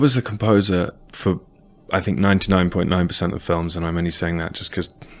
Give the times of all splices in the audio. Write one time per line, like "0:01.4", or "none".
none